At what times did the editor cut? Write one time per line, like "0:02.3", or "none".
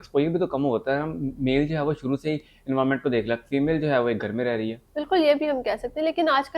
none